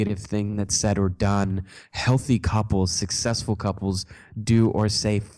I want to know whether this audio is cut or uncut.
uncut